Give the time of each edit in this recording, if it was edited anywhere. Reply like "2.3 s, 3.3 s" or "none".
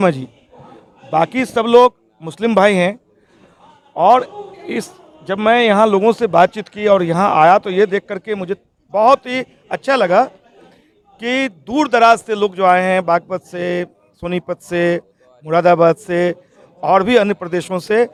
none